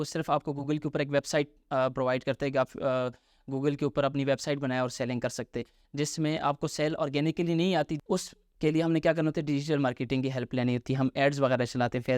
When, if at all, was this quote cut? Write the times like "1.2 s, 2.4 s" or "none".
7.9 s

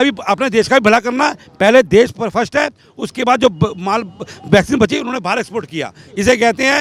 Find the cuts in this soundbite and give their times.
none

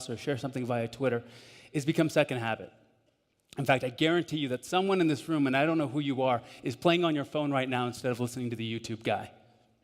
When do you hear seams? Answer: 2.1 s

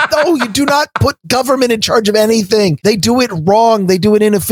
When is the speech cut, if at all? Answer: 2.8 s

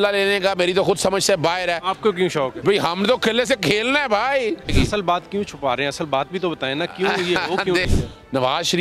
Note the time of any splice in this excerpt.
4.7 s, 7.9 s

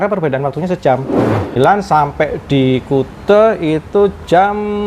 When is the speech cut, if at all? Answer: 1.6 s

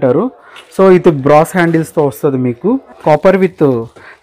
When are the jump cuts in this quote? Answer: 2.9 s

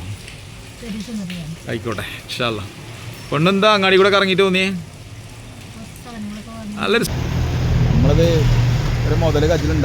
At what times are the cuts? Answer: 7.1 s

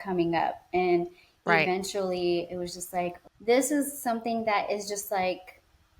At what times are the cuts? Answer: 3.3 s

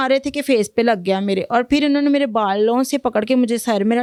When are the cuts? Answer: none

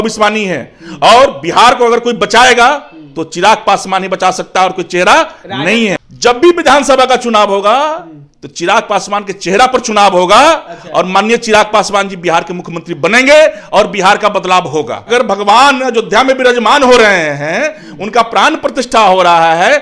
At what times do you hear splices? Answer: 6.0 s, 15.0 s

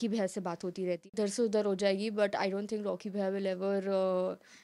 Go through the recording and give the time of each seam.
1.1 s

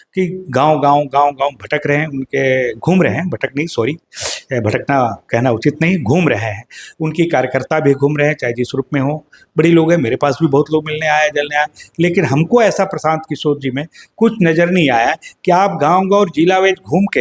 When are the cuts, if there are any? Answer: none

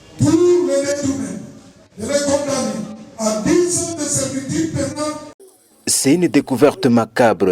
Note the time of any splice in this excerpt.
5.4 s

